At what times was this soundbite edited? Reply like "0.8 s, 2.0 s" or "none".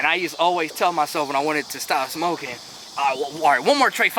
none